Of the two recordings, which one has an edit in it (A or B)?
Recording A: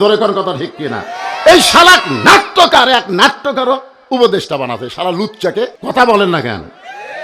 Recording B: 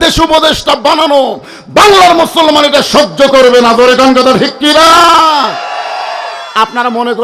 A